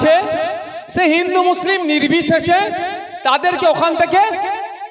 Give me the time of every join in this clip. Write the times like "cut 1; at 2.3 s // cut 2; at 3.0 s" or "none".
none